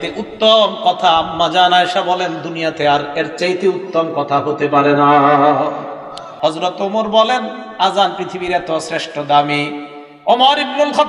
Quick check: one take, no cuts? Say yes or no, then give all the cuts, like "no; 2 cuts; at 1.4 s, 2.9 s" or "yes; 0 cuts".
no; 1 cut; at 6.2 s